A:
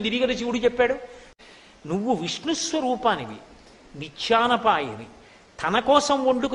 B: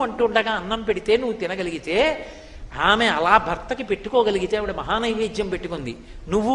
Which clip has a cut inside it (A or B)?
A